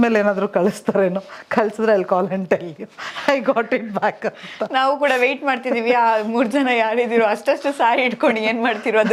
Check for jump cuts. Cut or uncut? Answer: uncut